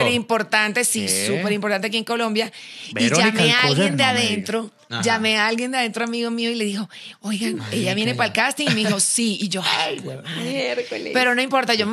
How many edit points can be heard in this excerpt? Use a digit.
0